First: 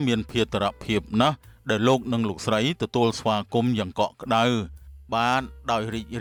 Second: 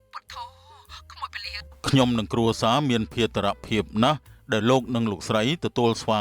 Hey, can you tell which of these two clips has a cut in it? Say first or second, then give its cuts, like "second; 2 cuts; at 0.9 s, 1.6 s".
second; 1 cut; at 1.7 s